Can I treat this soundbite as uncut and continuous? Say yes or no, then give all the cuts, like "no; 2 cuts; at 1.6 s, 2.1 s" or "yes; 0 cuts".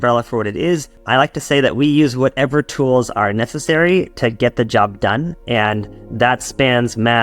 no; 1 cut; at 1.0 s